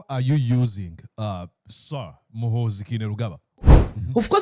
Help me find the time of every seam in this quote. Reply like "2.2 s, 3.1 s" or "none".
3.5 s

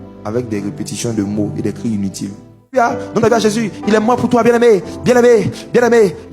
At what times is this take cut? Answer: 2.7 s

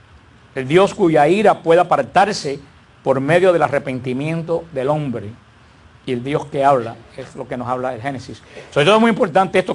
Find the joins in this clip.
7.1 s

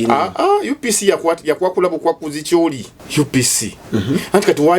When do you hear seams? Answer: 2.9 s

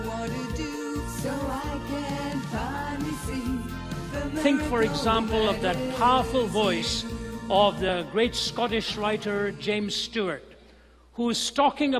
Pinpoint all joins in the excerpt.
none

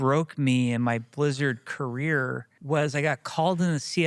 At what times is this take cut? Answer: 2.5 s

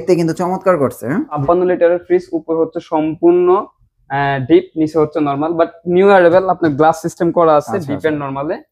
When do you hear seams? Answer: 1.4 s

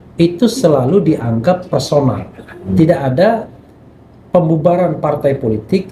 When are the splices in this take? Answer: 2.6 s

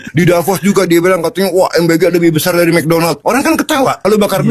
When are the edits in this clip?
none

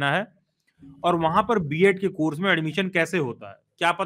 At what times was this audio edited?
none

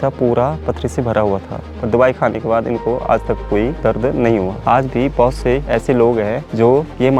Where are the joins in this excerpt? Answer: 1.7 s

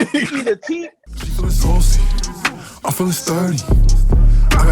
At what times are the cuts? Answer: 1.0 s

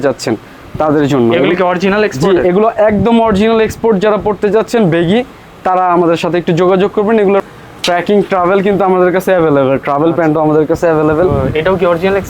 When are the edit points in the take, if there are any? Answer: 7.5 s

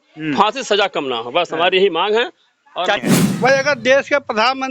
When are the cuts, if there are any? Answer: 3.3 s

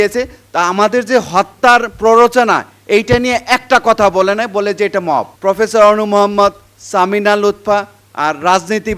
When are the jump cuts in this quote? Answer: 5.3 s

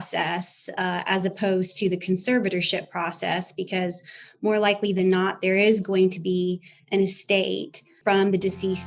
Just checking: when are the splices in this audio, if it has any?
8.0 s

